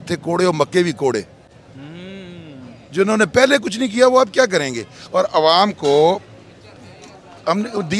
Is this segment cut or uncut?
uncut